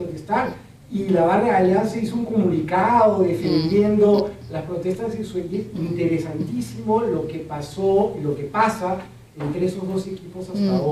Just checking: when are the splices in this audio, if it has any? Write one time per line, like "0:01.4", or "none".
0:08.1